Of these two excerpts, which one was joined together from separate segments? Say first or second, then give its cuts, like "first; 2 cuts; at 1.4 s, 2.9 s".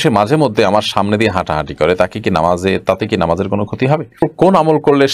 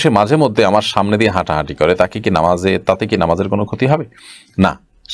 first; 1 cut; at 4.2 s